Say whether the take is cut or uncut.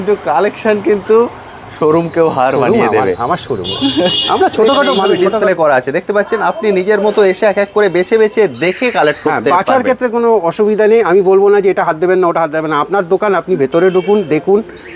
cut